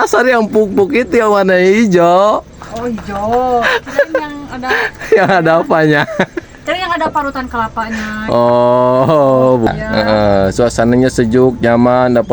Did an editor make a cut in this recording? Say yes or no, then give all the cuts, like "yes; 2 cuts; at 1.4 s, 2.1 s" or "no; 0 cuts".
yes; 1 cut; at 9.7 s